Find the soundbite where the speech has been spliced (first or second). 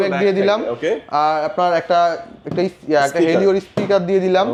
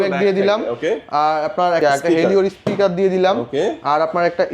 second